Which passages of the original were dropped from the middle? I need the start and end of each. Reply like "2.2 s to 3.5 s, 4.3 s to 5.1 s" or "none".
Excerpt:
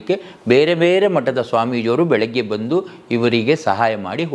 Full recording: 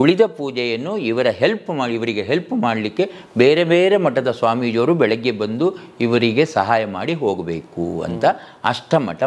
none